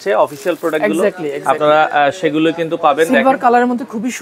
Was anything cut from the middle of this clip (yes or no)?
no